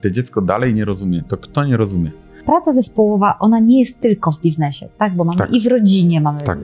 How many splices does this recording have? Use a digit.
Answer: 1